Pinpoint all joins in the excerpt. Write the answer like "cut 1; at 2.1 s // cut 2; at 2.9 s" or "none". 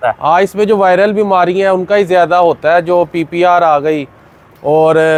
none